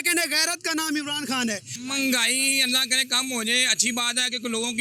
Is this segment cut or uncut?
cut